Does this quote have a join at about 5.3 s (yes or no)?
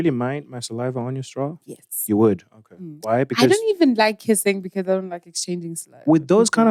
no